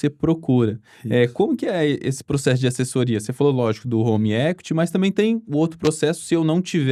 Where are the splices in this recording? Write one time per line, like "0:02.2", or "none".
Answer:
none